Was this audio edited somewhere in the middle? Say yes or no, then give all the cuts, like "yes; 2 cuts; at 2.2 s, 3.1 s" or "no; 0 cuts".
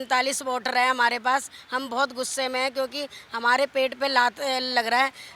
no; 0 cuts